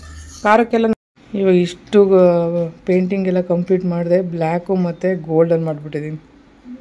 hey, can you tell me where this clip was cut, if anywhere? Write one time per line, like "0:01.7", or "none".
0:00.9

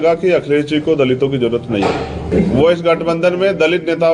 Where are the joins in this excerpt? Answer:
0:02.3

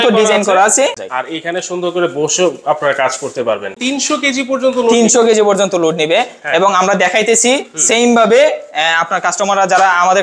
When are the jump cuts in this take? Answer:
0:01.0
0:03.7

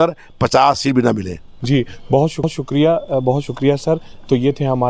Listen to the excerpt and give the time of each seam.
none

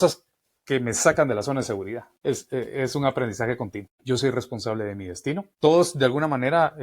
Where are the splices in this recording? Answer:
0:02.1
0:03.9
0:05.5

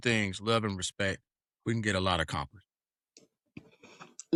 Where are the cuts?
none

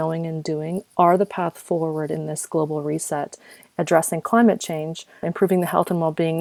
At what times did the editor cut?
0:03.5
0:05.2

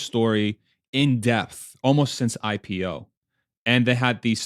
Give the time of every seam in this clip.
none

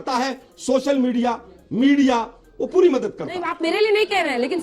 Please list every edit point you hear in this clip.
0:03.4

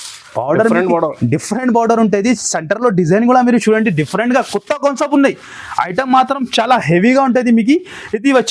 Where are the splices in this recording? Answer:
none

